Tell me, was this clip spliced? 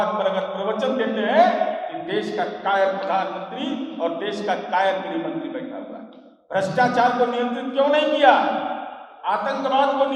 no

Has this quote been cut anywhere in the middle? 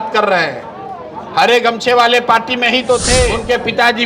yes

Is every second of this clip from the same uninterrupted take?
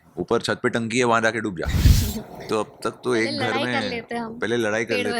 no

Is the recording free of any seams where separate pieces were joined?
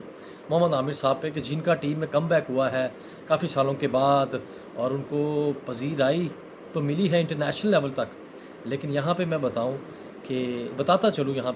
yes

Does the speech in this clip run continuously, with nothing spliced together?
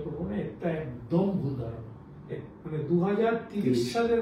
no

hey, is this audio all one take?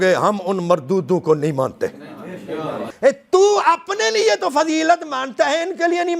no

